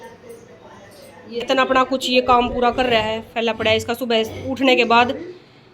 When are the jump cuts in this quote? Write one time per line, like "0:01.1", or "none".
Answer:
0:01.4